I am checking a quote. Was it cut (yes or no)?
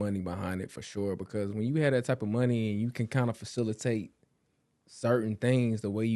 no